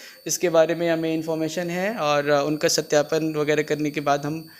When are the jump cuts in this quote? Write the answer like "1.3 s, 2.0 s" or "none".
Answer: none